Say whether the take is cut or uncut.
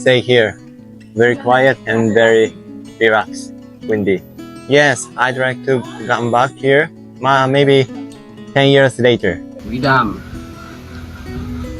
cut